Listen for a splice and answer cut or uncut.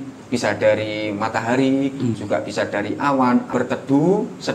cut